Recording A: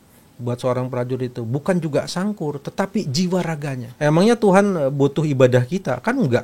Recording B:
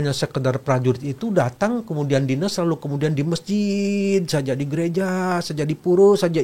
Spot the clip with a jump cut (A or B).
A